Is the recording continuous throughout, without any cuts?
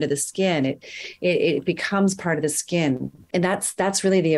no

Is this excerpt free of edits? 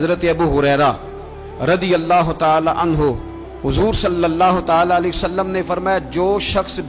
yes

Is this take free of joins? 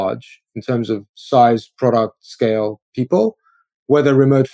no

